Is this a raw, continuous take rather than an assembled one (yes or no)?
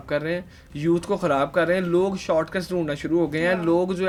yes